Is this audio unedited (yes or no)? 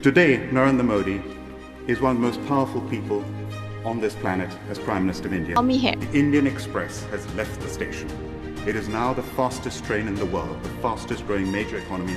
no